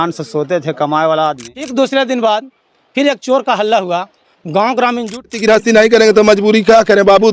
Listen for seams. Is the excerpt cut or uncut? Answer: cut